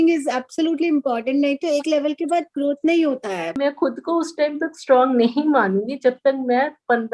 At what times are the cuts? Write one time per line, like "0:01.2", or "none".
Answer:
0:03.6